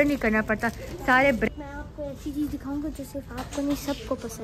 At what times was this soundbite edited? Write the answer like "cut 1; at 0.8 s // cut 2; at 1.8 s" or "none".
cut 1; at 1.5 s